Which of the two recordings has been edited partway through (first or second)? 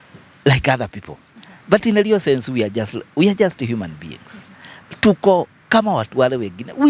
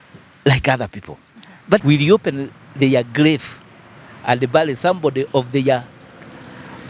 second